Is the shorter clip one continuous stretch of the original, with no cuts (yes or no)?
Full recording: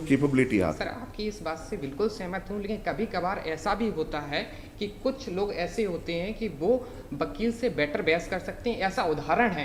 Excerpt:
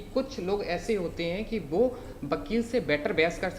yes